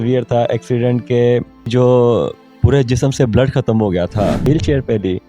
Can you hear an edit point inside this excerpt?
yes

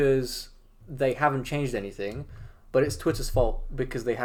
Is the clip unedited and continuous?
yes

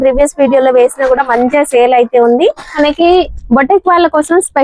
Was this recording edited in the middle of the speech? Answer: yes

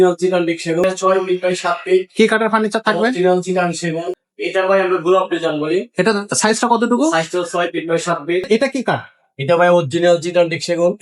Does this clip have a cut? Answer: yes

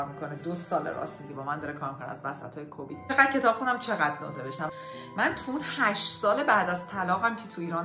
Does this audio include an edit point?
yes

